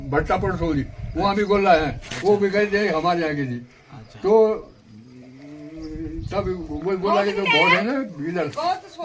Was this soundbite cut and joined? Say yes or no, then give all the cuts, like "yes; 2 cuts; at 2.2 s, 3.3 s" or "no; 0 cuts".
no; 0 cuts